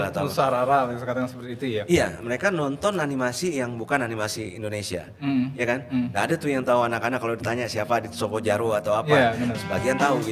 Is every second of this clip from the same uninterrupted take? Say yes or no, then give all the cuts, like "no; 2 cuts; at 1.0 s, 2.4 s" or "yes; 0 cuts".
yes; 0 cuts